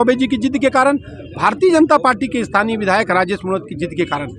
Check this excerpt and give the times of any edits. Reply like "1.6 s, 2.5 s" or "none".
none